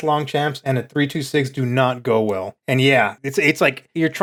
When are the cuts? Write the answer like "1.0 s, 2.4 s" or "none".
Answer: none